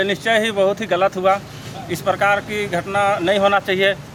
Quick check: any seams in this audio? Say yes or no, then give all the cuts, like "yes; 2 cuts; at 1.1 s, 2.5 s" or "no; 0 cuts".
no; 0 cuts